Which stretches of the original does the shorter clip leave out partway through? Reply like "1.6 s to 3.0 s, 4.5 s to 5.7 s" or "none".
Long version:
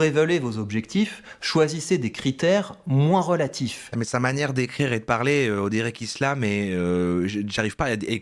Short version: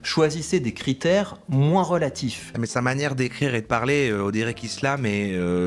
none